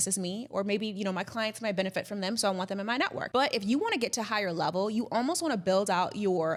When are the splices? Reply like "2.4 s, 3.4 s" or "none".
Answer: none